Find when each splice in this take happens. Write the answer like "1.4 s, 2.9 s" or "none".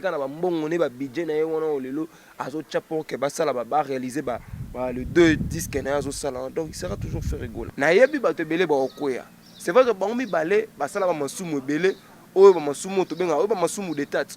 7.6 s